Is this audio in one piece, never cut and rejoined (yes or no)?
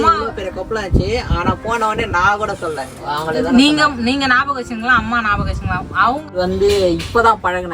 no